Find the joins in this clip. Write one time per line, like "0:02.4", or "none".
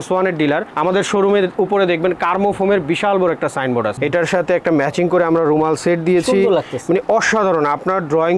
0:03.9